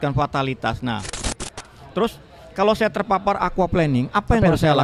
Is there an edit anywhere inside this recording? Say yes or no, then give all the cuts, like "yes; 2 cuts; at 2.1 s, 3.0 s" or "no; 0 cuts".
yes; 1 cut; at 1.3 s